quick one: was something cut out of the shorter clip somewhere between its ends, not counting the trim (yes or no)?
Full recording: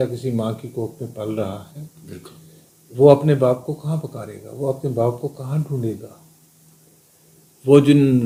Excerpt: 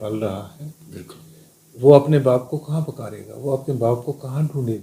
no